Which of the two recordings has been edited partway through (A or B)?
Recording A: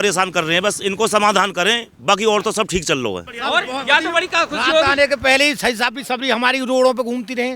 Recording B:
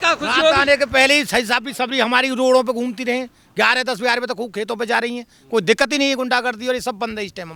A